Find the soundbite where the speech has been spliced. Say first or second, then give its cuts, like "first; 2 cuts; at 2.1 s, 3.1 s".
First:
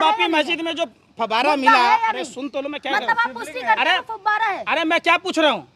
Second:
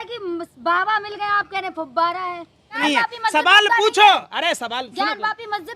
second; 1 cut; at 2.8 s